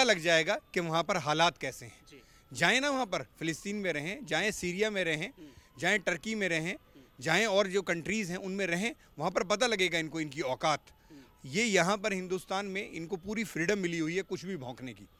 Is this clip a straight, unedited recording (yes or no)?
yes